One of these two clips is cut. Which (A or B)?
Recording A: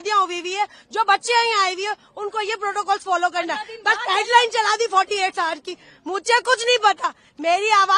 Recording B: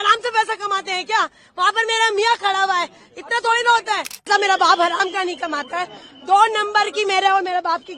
B